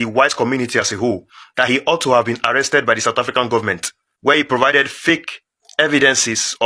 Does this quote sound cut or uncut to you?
uncut